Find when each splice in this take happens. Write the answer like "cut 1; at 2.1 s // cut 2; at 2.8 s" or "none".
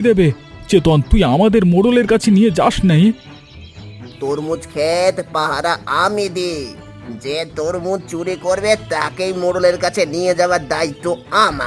none

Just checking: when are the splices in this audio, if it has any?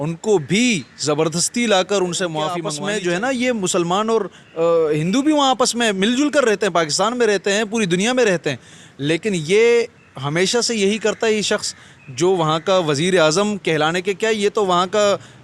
cut 1; at 2.7 s

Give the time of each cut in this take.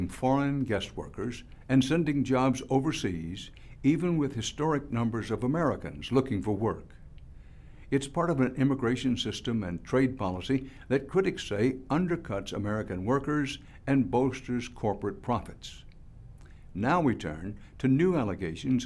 cut 1; at 9.3 s

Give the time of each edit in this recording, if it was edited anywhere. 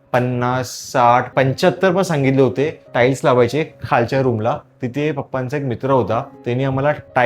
cut 1; at 1.3 s // cut 2; at 6.3 s

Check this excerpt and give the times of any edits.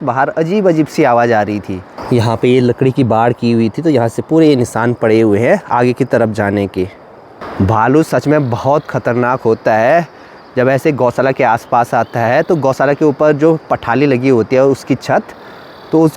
none

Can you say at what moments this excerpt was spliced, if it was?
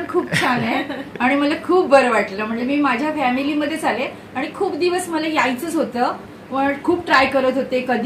none

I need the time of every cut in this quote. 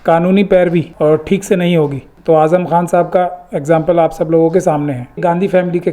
cut 1; at 0.9 s // cut 2; at 2.1 s // cut 3; at 5.2 s

